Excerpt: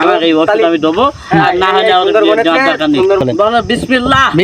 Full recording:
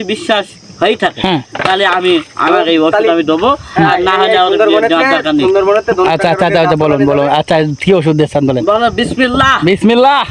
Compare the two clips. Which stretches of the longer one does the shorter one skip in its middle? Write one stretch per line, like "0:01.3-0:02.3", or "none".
0:05.6-0:08.5